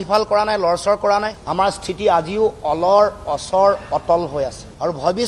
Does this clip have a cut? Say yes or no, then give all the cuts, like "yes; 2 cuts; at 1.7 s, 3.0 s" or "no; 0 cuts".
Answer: no; 0 cuts